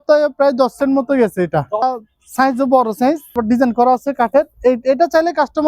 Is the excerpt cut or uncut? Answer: cut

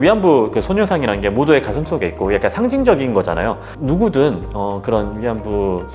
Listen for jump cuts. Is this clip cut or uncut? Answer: uncut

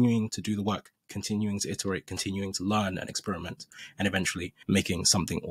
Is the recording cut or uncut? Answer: cut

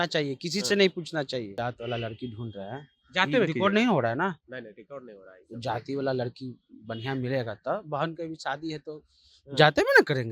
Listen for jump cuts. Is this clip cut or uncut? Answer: cut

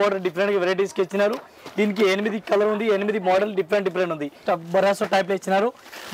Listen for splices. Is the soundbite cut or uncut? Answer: cut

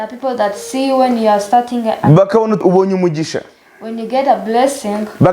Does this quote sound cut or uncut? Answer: cut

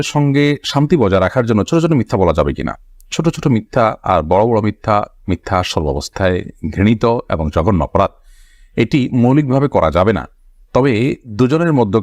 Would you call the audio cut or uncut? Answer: uncut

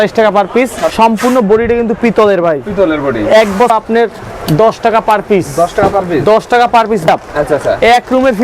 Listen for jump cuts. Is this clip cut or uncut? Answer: cut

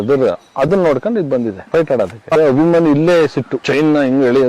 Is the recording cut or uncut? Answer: cut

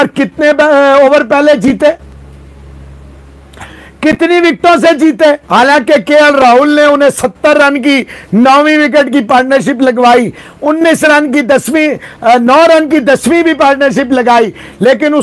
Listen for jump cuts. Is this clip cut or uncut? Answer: uncut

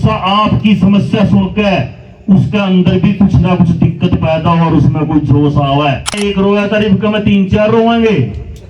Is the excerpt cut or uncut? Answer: cut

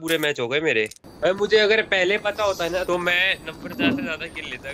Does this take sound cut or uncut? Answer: cut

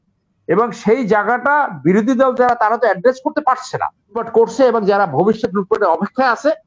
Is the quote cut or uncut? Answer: cut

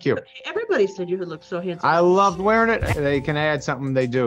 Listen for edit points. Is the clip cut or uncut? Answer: cut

